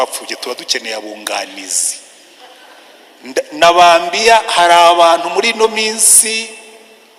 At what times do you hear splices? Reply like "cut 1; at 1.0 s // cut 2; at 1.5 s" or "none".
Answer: none